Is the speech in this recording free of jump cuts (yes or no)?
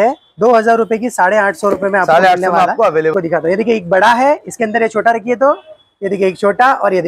no